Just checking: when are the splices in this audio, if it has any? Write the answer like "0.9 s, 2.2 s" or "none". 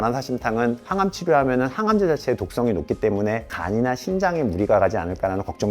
3.5 s